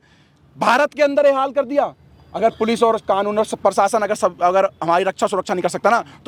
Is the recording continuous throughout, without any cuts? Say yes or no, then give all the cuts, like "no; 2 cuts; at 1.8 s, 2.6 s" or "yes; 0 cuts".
yes; 0 cuts